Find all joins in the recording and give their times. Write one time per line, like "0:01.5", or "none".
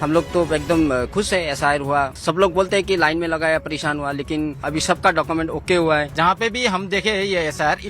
0:02.2
0:04.6
0:06.1